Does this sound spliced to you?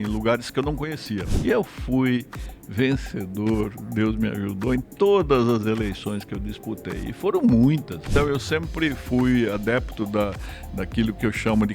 yes; 2 cuts; at 1.4 s, 8.1 s

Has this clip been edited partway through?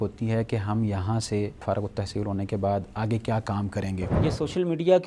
yes; 2 cuts; at 1.6 s, 4.1 s

